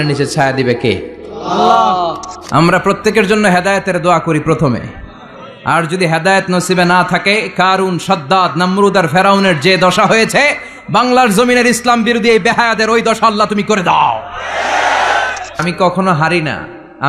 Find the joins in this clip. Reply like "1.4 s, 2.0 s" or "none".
2.4 s, 15.6 s